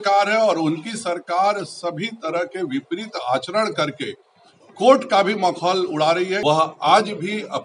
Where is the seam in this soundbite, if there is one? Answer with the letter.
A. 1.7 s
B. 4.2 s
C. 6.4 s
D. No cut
C